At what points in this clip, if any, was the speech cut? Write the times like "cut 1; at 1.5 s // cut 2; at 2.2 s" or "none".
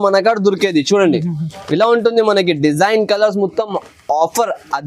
none

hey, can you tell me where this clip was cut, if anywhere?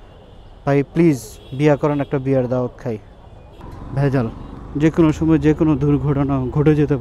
cut 1; at 3.8 s

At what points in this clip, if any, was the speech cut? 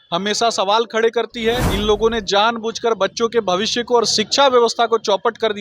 cut 1; at 1.7 s

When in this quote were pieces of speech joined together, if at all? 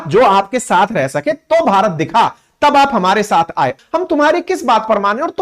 cut 1; at 3.7 s

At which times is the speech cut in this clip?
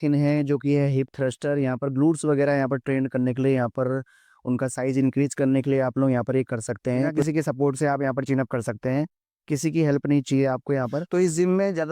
cut 1; at 7.2 s // cut 2; at 11.0 s

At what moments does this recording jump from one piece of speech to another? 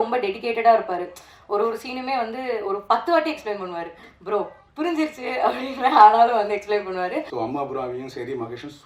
cut 1; at 7.3 s

